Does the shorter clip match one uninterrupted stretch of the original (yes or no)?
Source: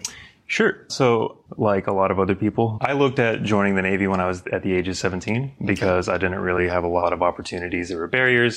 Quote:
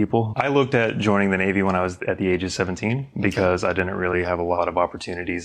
yes